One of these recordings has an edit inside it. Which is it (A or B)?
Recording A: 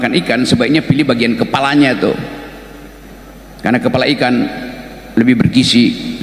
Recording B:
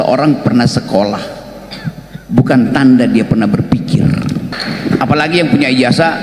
B